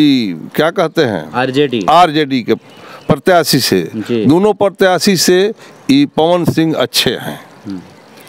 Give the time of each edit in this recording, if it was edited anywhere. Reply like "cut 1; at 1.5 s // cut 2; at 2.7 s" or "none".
none